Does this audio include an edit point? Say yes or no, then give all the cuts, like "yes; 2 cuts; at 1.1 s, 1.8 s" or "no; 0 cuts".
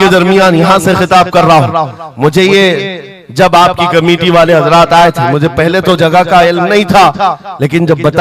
no; 0 cuts